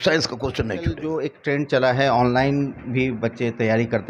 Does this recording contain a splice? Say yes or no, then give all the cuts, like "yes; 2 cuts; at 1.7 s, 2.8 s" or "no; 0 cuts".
yes; 1 cut; at 1.0 s